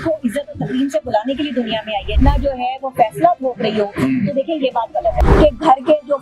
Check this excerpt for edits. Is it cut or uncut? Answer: cut